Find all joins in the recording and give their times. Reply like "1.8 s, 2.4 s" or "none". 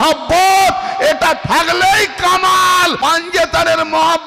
3.0 s